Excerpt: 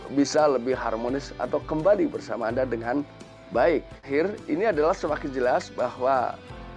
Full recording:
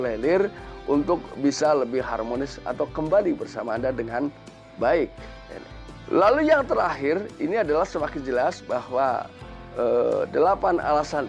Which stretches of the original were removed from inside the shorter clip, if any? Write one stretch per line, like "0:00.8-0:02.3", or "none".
0:05.3-0:07.0